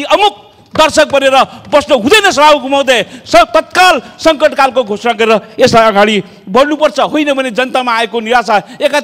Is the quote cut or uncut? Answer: uncut